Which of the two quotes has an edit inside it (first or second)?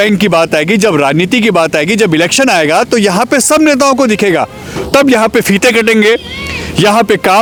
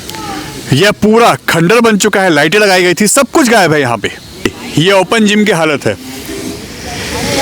second